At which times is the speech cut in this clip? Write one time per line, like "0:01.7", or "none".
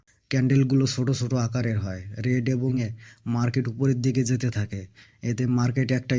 0:02.8